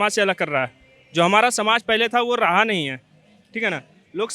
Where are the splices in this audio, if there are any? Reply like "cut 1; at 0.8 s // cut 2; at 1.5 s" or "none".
none